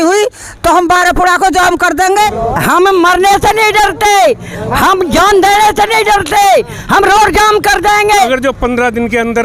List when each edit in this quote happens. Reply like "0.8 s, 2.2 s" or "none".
2.3 s, 8.3 s